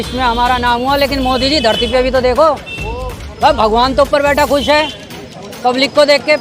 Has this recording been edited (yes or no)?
no